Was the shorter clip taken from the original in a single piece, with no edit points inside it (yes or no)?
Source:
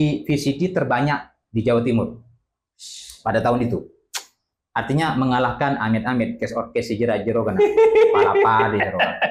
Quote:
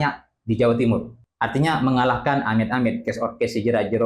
no